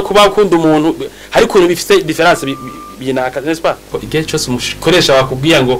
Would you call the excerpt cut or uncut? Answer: cut